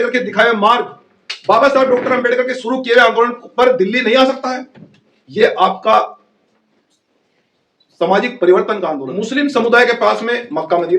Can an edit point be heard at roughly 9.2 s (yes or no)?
yes